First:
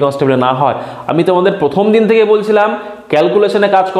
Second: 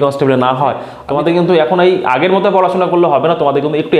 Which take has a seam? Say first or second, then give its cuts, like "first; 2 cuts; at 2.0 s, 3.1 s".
second; 1 cut; at 0.9 s